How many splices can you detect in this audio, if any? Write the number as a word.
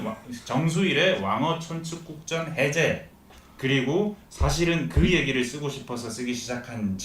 one